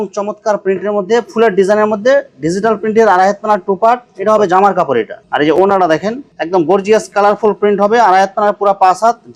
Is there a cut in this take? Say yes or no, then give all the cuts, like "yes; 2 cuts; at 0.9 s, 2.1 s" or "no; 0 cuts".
no; 0 cuts